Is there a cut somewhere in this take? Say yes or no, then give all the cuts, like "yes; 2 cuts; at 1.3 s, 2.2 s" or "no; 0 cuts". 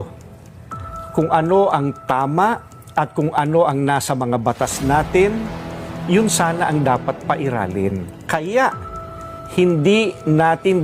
no; 0 cuts